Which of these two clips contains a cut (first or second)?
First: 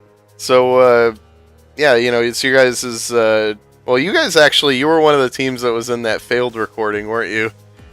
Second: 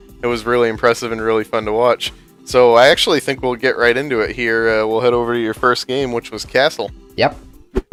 first